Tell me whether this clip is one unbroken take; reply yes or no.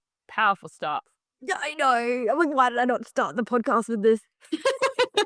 yes